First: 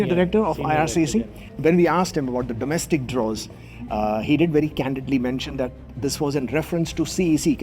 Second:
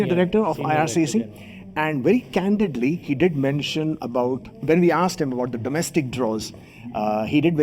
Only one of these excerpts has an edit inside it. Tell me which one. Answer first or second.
first